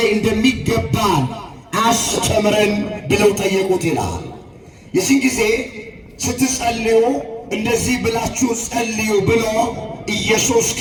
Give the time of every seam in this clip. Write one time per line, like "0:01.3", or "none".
none